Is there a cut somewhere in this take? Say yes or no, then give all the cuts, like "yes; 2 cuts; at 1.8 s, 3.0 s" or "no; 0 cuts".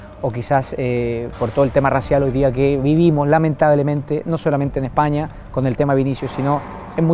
no; 0 cuts